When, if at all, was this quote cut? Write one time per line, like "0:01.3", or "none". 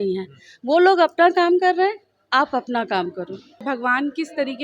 0:03.6